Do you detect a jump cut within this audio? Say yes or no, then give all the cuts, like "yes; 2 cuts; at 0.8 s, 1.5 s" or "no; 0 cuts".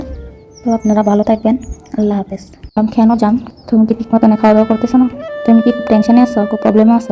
yes; 1 cut; at 2.8 s